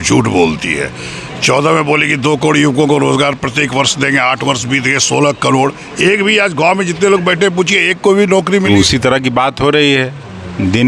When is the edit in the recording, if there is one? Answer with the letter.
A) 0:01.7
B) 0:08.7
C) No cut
B